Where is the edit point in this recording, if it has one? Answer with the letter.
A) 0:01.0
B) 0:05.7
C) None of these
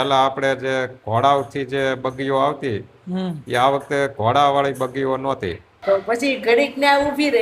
B